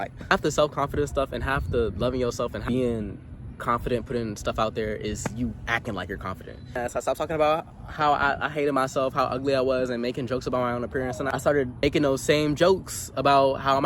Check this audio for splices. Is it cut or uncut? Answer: cut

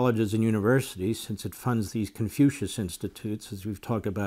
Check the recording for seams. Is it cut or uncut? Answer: uncut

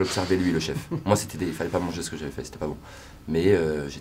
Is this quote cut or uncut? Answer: uncut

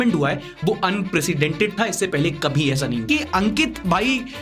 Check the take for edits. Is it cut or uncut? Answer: cut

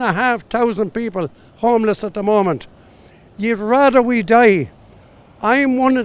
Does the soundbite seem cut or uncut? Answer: uncut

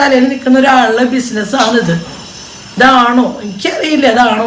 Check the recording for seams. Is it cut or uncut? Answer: uncut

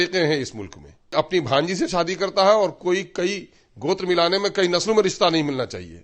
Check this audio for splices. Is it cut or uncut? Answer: cut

